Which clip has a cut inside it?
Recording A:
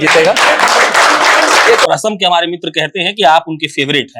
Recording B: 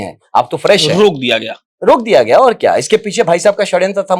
A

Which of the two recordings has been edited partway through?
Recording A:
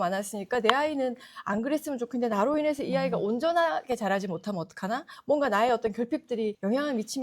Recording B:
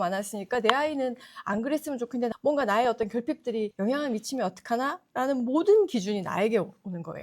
B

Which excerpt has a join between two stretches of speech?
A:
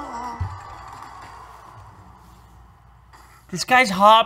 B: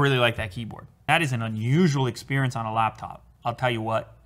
B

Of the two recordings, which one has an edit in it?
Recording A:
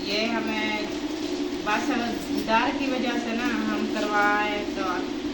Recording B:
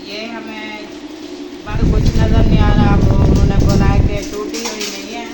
B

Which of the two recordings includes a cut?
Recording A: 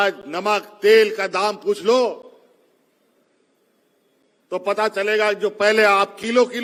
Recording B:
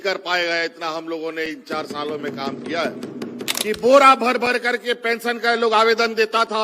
B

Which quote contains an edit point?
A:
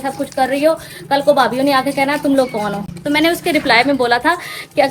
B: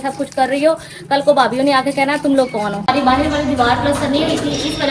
B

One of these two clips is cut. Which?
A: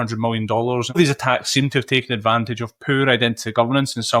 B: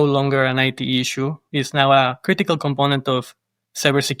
A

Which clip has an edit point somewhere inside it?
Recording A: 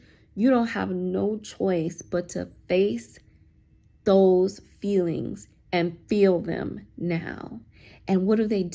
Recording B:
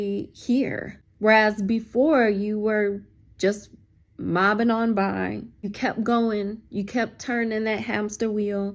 B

